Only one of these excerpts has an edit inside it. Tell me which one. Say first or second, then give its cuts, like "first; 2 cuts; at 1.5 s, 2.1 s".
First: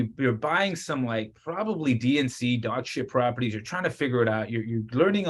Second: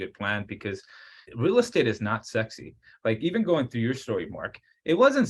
second; 1 cut; at 1.2 s